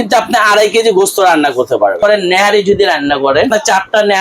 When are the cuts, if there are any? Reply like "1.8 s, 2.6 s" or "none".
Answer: 2.0 s, 3.5 s